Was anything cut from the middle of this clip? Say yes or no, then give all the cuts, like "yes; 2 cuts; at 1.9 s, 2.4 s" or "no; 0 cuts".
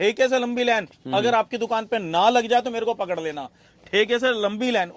no; 0 cuts